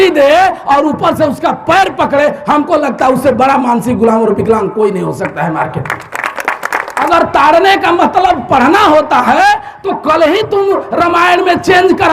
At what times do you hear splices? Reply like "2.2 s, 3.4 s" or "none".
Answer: 7.0 s